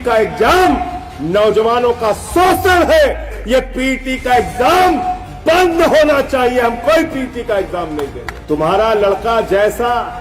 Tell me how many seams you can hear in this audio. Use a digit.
2